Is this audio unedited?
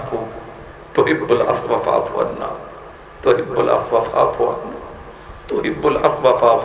yes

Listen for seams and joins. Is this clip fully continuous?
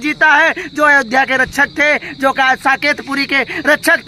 yes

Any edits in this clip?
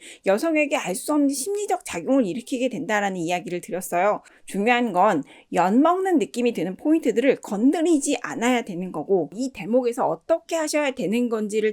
yes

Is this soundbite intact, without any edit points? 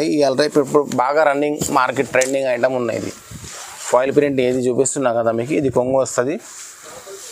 yes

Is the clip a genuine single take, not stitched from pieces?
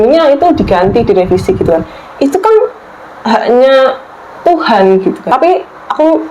no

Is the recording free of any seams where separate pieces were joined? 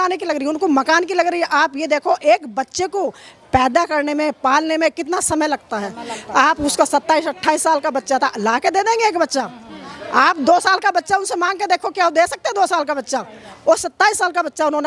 yes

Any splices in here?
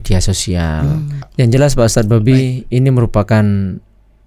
yes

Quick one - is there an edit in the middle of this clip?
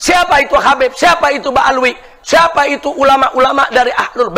no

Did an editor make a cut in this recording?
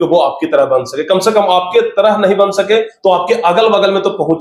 no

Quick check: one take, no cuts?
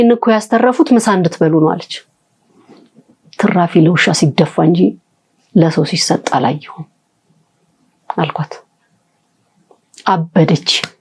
yes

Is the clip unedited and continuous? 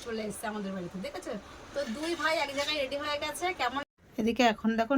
no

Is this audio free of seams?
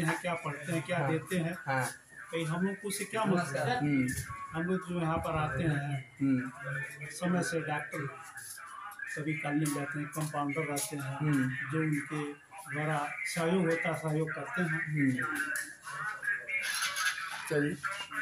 yes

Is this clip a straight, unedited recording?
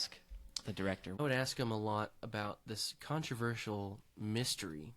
no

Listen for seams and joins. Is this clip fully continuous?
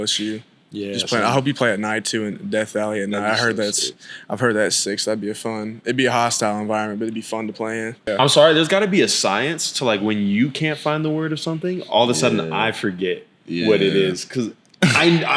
no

